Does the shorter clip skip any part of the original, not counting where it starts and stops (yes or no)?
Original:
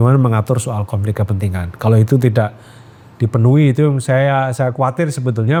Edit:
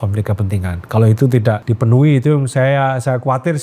yes